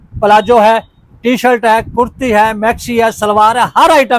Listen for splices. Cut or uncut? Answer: uncut